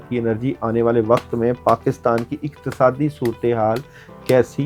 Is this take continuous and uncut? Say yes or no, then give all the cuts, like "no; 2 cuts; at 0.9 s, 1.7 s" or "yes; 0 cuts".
yes; 0 cuts